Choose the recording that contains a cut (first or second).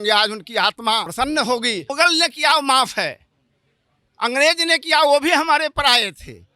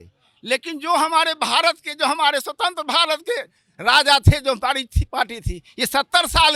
first